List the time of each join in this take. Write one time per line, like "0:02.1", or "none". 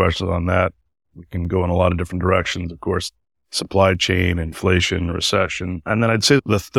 none